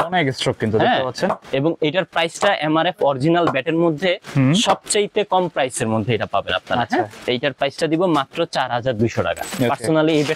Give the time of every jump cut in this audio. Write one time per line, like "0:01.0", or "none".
0:07.2
0:09.5

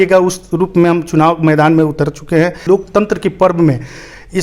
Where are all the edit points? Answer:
0:02.6

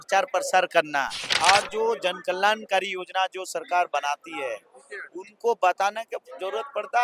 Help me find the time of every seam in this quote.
0:01.2

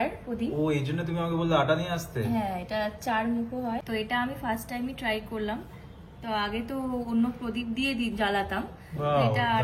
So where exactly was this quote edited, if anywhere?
0:03.8

